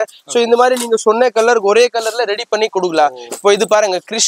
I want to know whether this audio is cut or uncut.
uncut